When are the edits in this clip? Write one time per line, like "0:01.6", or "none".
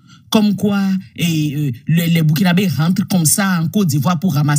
none